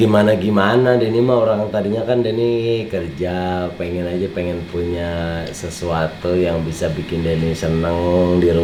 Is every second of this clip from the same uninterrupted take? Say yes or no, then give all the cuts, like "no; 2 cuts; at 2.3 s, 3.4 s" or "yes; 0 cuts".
yes; 0 cuts